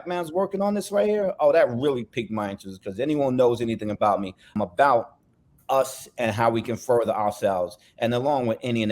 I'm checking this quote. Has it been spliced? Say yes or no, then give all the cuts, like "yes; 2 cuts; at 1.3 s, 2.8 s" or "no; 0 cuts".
yes; 1 cut; at 4.4 s